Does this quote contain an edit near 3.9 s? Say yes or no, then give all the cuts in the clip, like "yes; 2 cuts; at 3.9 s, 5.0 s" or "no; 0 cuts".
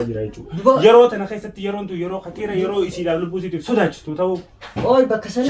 no; 0 cuts